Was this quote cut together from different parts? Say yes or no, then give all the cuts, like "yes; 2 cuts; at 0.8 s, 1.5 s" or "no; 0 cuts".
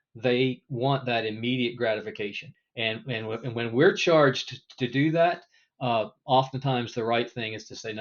yes; 1 cut; at 2.5 s